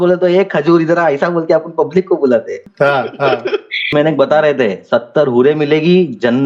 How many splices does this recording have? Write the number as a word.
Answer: two